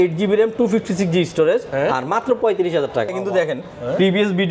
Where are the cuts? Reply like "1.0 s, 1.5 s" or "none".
3.2 s